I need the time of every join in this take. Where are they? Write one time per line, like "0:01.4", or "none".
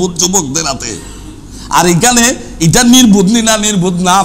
none